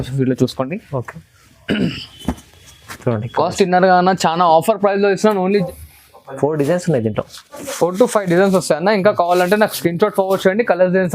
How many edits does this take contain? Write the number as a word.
one